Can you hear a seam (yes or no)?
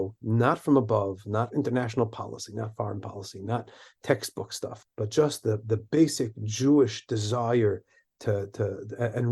yes